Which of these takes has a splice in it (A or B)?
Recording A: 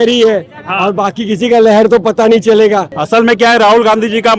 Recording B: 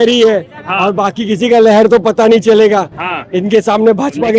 A